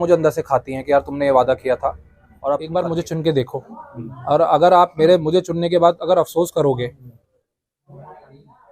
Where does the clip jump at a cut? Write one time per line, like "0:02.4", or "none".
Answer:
0:02.6